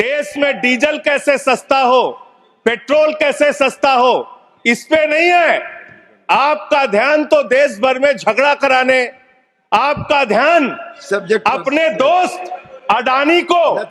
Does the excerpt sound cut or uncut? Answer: uncut